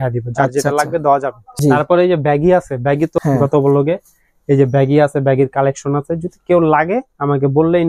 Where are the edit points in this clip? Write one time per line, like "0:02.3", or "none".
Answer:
0:01.4
0:03.1

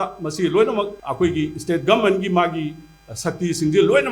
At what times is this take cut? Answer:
0:01.0

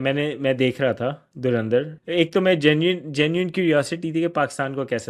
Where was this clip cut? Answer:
0:02.0

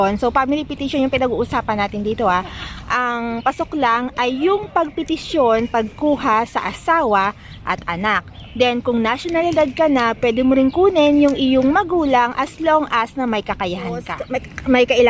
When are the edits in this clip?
0:14.2

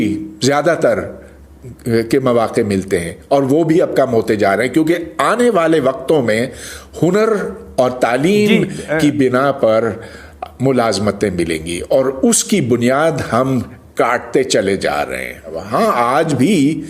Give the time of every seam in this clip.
0:15.6

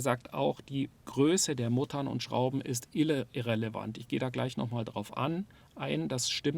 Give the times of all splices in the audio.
none

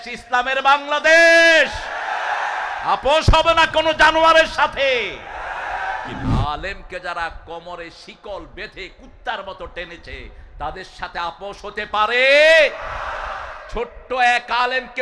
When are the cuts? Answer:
0:06.3

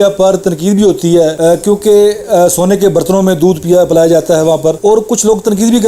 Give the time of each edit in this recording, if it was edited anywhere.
0:01.4
0:04.8

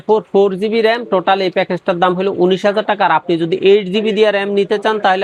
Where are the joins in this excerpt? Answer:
none

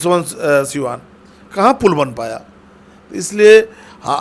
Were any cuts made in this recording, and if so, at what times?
none

